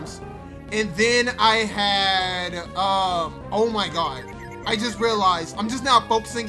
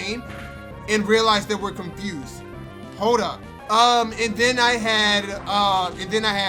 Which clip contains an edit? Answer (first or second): second